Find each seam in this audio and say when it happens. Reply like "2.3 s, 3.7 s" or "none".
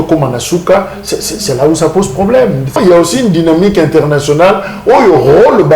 2.8 s